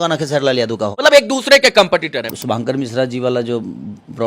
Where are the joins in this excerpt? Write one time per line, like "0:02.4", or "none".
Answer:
0:00.9
0:02.3